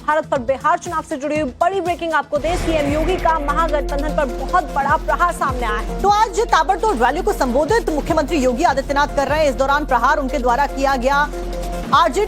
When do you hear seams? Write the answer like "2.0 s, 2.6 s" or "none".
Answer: 2.1 s